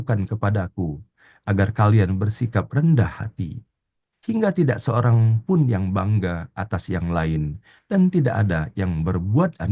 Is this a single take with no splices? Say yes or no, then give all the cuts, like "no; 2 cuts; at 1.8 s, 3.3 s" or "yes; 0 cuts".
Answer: yes; 0 cuts